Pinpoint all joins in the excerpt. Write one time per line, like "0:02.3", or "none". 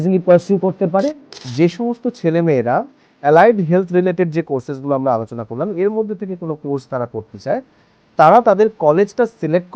0:01.4